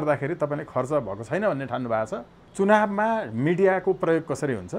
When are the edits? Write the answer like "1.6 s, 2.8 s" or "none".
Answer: 2.4 s